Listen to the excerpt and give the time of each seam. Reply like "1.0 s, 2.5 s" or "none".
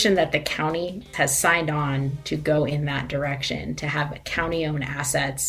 1.0 s

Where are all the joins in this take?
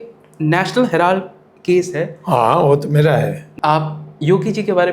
3.4 s

